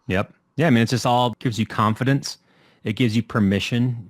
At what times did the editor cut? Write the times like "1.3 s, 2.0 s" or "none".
1.4 s